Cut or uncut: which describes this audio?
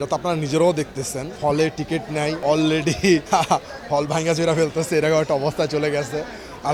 uncut